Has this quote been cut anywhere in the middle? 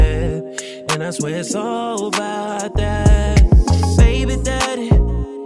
no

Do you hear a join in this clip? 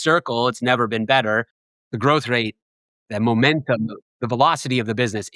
yes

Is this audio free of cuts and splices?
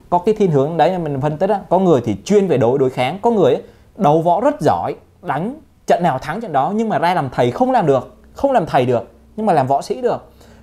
yes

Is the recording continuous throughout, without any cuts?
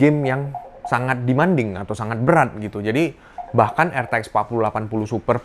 yes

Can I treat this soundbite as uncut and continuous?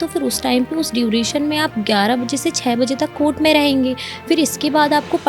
yes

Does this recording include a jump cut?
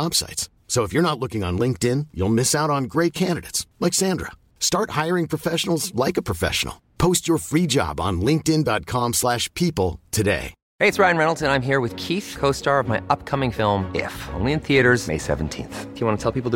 yes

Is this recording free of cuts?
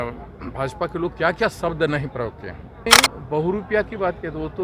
no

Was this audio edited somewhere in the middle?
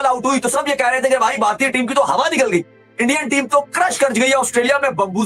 no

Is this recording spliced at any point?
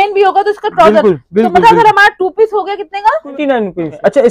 yes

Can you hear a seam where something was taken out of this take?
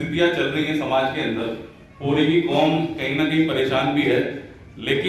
no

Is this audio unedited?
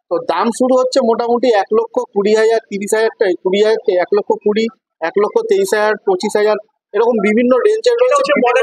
yes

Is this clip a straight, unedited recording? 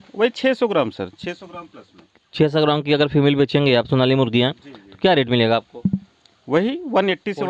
yes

